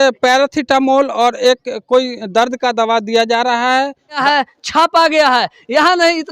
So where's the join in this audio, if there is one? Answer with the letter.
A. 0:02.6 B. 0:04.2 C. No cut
B